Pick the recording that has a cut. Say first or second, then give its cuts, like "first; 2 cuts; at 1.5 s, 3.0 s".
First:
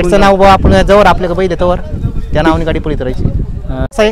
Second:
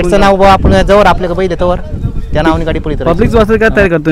second; 1 cut; at 3.0 s